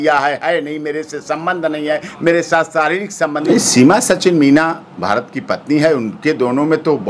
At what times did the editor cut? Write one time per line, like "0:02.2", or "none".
0:03.4